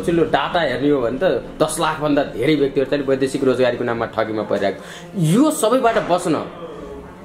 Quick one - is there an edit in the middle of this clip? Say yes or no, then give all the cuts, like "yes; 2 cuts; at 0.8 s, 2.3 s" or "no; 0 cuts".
no; 0 cuts